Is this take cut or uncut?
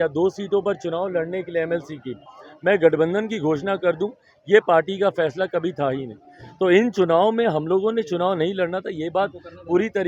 uncut